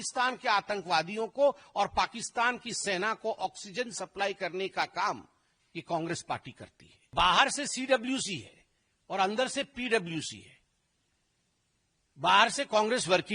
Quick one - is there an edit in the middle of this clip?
yes; 1 cut; at 7.1 s

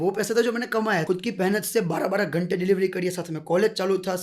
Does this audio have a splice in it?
yes; 1 cut; at 1.0 s

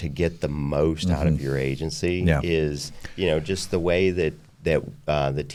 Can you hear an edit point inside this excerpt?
no; 0 cuts

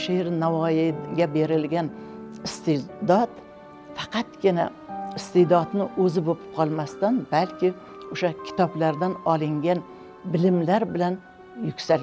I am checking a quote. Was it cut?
no; 0 cuts

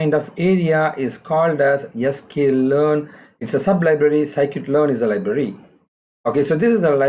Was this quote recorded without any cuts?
yes; 0 cuts

